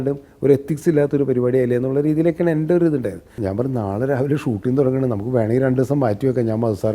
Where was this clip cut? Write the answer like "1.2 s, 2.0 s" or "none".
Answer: 3.3 s